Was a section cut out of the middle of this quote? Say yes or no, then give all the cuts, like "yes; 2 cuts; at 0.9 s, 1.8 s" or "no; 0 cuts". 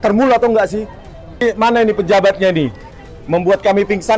yes; 1 cut; at 1.4 s